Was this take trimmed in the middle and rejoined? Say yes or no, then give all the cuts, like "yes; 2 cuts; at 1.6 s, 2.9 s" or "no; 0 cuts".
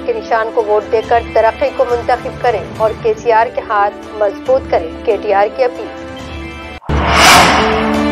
yes; 1 cut; at 2.9 s